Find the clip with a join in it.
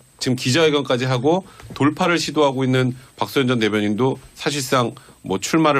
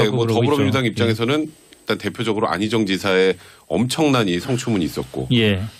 first; 1 cut; at 2.9 s

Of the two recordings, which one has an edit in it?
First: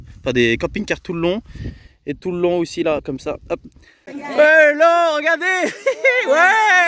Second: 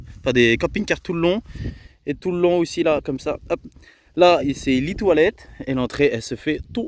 first; 1 cut; at 4.2 s

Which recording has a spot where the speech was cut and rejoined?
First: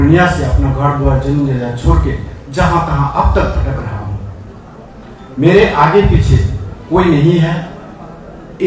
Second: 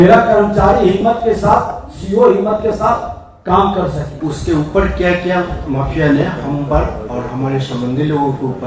second; 1 cut; at 4.1 s

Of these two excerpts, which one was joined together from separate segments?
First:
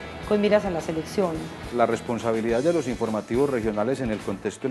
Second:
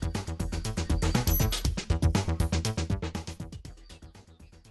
first; 1 cut; at 1.5 s

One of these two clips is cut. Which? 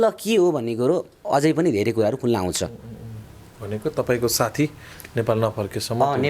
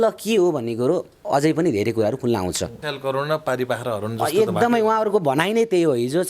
second; 1 cut; at 2.8 s

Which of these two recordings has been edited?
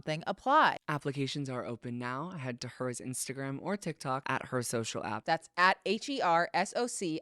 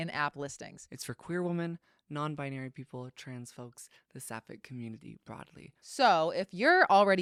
first; 2 cuts; at 0.8 s, 4.2 s

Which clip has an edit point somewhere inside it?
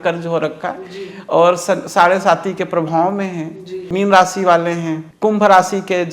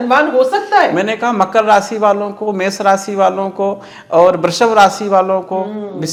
first; 2 cuts; at 3.9 s, 5.0 s

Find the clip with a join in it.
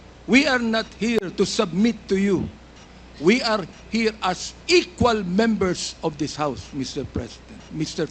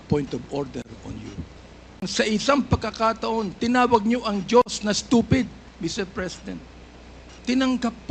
second; 1 cut; at 2.1 s

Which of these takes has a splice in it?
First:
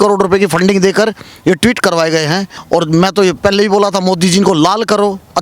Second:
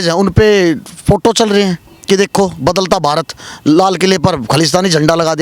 first; 1 cut; at 2.5 s

